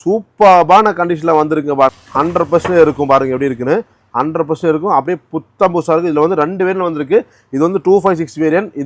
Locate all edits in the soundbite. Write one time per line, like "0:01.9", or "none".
0:01.9